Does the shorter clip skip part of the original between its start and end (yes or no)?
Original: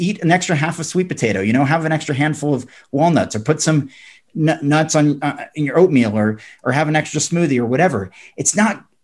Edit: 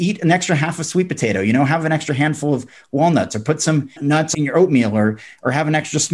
yes